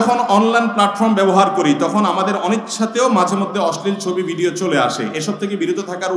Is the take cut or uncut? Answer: uncut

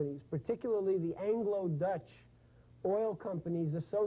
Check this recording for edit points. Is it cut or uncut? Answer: cut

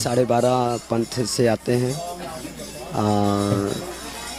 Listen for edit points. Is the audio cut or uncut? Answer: uncut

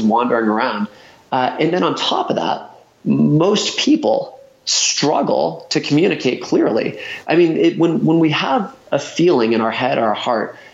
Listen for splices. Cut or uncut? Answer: uncut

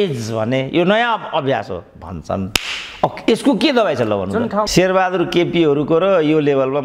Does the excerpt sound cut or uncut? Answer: cut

